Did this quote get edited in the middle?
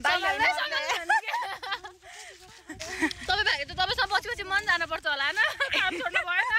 yes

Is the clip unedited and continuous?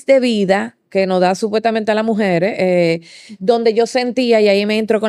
yes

